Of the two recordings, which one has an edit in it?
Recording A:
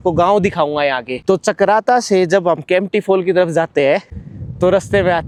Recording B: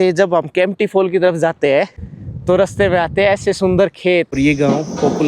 B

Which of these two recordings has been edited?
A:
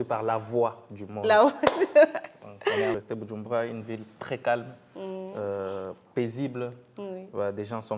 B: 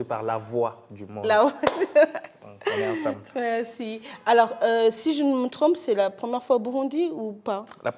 A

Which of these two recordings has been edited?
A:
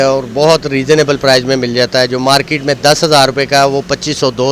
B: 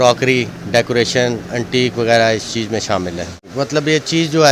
B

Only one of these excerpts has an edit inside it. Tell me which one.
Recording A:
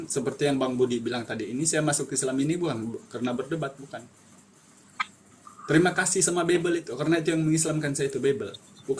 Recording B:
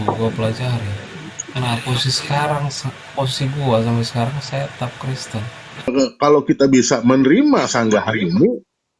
B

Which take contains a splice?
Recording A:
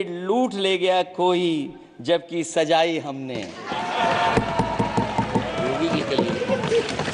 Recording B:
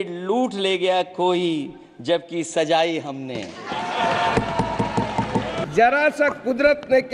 B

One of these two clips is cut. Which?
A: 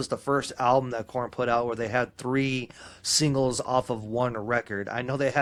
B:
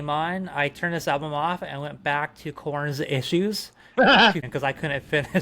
B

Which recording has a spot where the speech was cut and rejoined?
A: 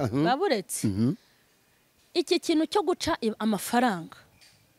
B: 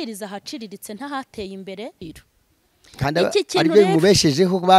B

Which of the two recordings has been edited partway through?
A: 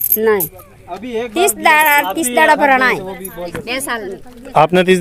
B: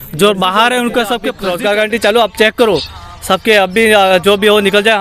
B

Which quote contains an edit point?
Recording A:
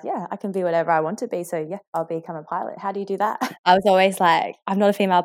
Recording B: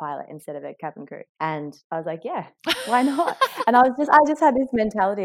A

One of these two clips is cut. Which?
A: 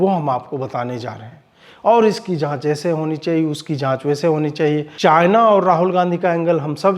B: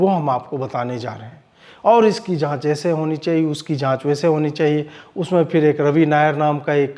A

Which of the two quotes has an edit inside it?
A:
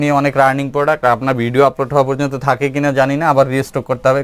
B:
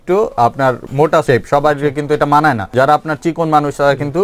B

